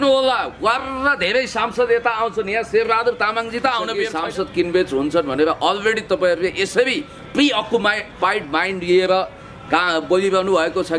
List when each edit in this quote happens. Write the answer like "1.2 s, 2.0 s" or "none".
4.1 s